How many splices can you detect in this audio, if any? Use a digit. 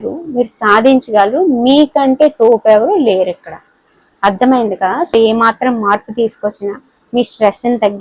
1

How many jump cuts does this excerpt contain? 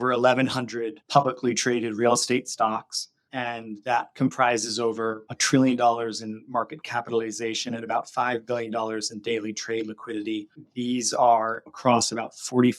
1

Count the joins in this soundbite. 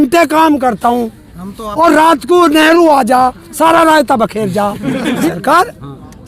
1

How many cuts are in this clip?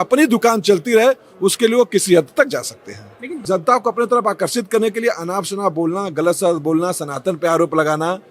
1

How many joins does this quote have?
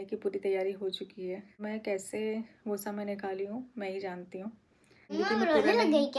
2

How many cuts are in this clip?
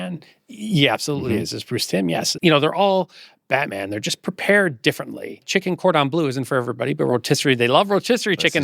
2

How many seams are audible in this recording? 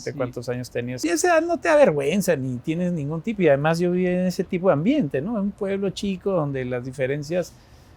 1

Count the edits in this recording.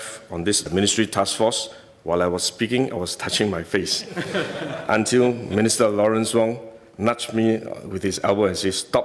0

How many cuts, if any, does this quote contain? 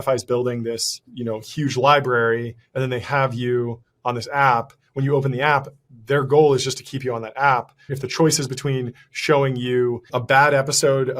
3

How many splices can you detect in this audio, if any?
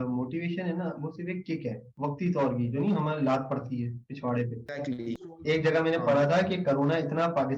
2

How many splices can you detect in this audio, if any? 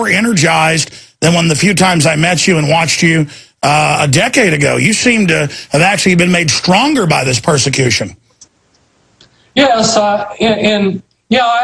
1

